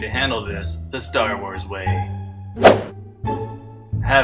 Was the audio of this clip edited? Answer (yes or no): yes